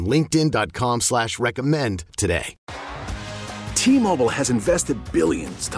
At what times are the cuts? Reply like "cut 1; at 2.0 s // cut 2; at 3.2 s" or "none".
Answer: cut 1; at 2.6 s